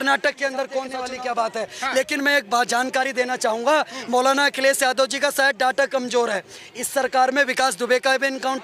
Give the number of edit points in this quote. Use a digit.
1